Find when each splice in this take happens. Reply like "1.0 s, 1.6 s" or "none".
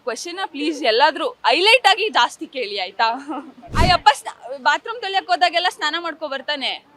3.7 s